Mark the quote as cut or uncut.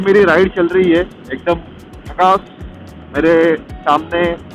uncut